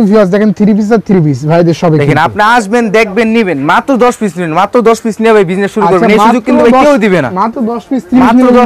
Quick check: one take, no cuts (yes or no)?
yes